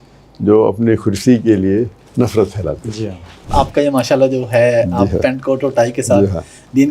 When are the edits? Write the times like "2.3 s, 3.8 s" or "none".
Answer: 3.5 s